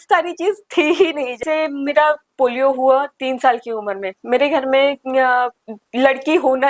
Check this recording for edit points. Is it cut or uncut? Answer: cut